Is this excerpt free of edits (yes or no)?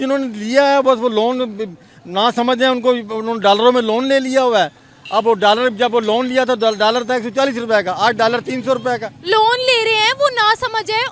yes